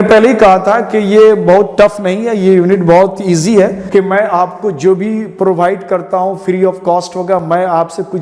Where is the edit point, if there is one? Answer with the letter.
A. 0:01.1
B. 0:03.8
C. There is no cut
B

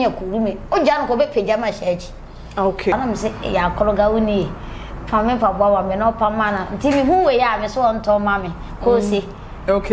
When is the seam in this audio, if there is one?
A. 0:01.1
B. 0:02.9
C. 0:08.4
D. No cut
B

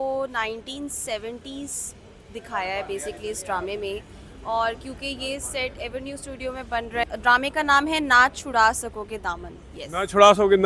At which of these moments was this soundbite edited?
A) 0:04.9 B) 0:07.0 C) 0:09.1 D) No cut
B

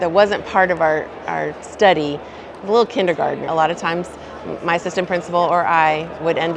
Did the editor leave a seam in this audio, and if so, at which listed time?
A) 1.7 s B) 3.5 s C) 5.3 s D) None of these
B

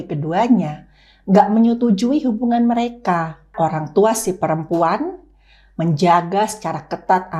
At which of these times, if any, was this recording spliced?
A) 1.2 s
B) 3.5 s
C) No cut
B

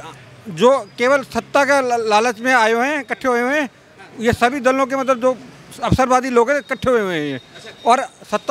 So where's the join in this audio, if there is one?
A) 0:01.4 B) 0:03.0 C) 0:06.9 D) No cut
D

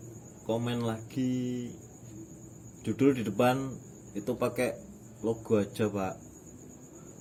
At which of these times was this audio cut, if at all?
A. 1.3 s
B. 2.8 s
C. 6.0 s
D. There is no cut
D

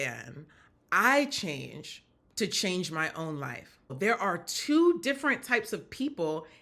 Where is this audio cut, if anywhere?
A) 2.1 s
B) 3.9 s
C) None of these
B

